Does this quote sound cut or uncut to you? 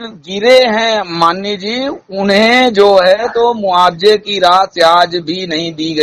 uncut